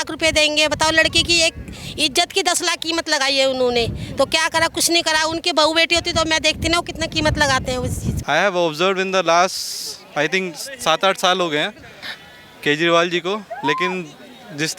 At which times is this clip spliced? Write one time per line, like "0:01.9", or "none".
0:08.1